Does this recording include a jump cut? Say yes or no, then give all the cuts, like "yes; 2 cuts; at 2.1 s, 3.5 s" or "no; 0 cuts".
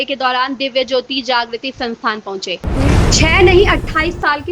yes; 1 cut; at 2.7 s